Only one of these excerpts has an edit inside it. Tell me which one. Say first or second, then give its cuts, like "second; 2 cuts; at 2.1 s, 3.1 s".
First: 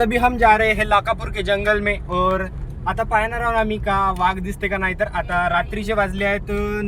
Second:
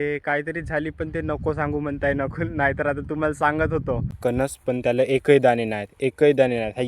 second; 1 cut; at 4.2 s